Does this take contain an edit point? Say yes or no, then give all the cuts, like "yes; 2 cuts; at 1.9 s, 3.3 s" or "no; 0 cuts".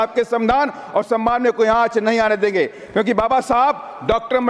no; 0 cuts